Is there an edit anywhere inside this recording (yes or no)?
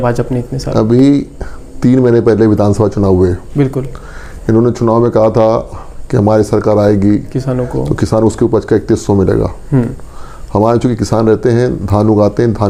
no